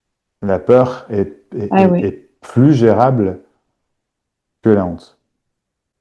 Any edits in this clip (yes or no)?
no